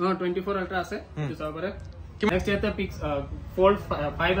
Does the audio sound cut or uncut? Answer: cut